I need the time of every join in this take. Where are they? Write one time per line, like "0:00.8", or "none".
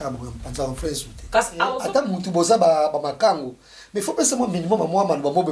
0:01.8

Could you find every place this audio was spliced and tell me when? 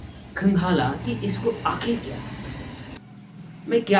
0:02.9

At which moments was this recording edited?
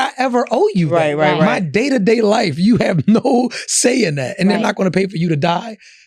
none

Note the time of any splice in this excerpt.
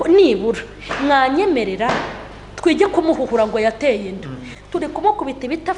0:04.5

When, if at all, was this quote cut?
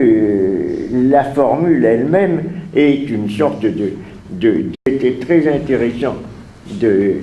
none

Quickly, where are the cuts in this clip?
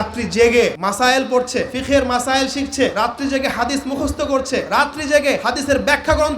0:00.8
0:01.7
0:02.9
0:04.7
0:05.4

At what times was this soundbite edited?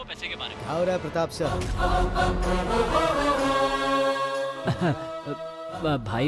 0:04.6

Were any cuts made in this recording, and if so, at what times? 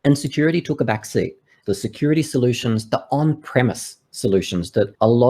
0:01.5

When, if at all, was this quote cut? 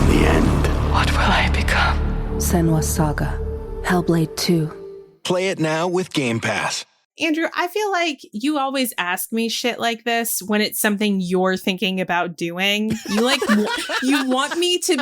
0:07.1

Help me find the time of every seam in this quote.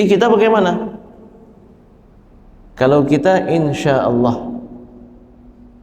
none

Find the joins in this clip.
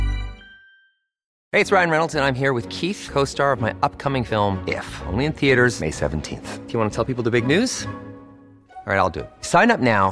0:01.3

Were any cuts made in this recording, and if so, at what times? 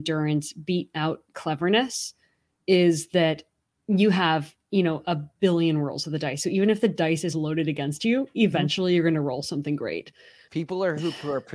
0:10.4

